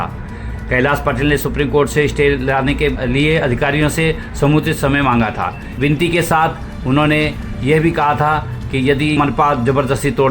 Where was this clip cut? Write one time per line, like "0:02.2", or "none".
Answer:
0:03.0
0:09.2